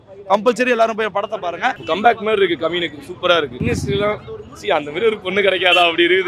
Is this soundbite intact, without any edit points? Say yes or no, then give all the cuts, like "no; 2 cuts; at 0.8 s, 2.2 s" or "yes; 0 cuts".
no; 2 cuts; at 1.8 s, 3.6 s